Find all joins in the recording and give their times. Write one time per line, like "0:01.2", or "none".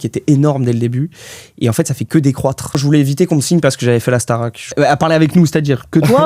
0:02.8
0:04.7